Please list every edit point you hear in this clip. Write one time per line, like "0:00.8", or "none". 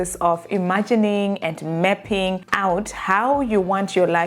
0:02.5

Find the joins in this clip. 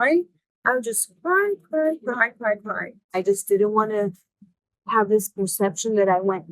0:03.1

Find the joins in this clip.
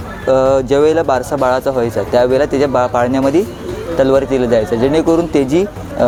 none

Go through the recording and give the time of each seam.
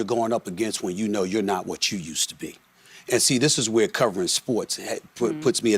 none

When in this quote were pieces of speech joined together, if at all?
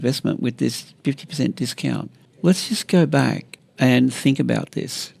none

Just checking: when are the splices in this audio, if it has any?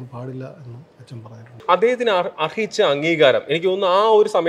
0:01.6

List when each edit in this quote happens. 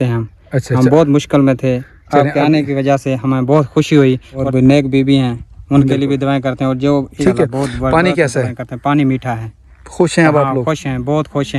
0:04.3
0:07.2

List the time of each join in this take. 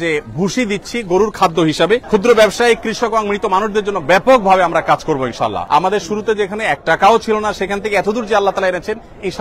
0:02.0
0:05.6

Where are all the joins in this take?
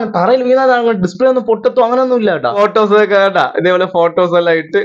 0:02.6

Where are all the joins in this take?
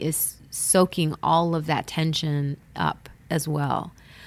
none

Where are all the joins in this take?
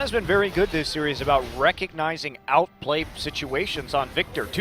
0:03.2

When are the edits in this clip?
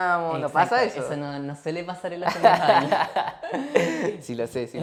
none

